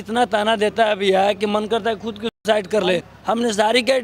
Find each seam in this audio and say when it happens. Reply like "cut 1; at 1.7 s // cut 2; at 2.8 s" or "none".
cut 1; at 3.1 s